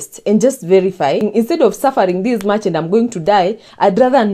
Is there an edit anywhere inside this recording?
yes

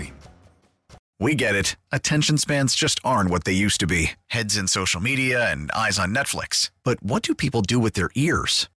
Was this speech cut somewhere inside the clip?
yes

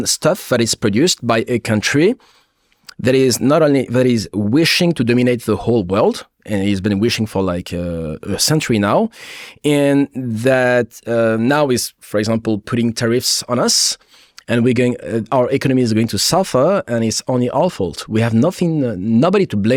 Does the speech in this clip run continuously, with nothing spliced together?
yes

